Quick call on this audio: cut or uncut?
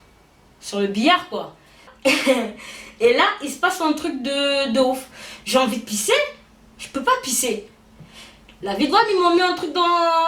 cut